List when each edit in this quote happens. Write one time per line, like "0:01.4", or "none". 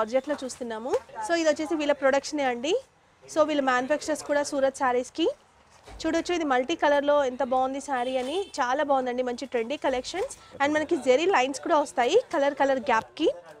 none